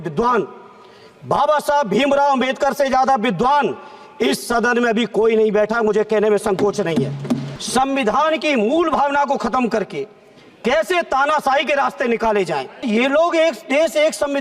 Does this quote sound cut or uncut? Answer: cut